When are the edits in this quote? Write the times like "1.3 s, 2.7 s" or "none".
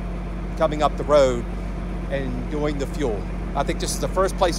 none